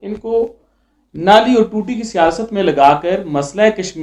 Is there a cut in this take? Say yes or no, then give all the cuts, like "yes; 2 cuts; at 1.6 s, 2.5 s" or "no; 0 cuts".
no; 0 cuts